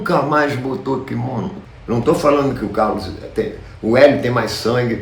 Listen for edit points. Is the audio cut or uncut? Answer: cut